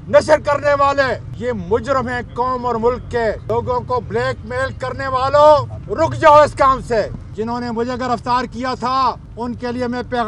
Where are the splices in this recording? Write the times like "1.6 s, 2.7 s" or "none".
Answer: 1.3 s, 3.4 s, 5.8 s, 7.2 s, 9.3 s